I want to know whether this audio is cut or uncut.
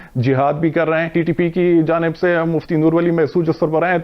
cut